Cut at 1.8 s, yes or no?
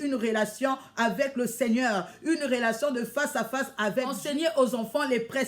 no